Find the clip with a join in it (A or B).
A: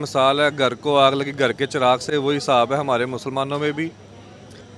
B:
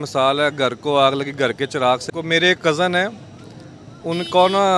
B